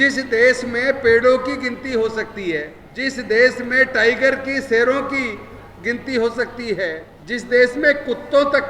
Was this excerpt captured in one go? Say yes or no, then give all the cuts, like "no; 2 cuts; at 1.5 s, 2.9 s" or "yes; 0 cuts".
no; 2 cuts; at 2.8 s, 7.1 s